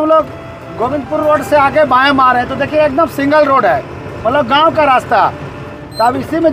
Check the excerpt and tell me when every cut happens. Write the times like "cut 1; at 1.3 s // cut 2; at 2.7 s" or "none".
none